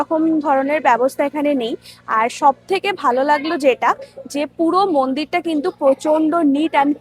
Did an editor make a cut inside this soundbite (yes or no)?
no